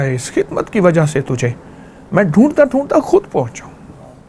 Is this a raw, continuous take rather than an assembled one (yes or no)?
yes